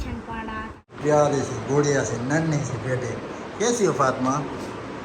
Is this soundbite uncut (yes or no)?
no